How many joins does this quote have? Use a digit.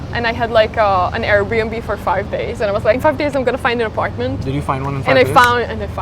1